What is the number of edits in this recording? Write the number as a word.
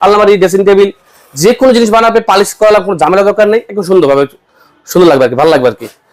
zero